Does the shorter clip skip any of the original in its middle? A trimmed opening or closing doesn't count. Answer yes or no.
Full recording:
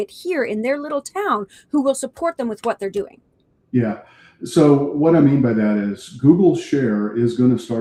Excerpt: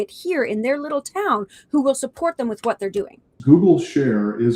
yes